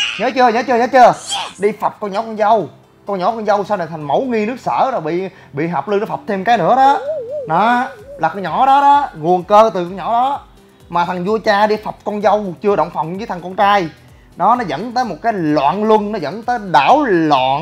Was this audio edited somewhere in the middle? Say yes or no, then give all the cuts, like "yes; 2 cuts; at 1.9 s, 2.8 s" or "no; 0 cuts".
no; 0 cuts